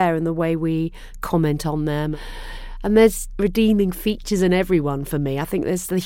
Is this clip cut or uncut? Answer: cut